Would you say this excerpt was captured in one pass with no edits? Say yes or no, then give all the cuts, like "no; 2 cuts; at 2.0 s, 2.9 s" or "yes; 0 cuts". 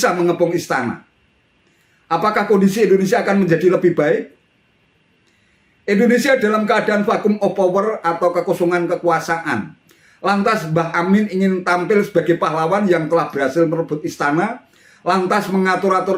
yes; 0 cuts